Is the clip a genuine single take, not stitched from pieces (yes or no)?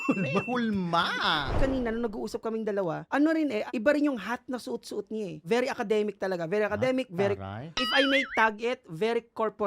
no